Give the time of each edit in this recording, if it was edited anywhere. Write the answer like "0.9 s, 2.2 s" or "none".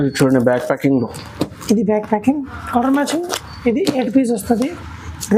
none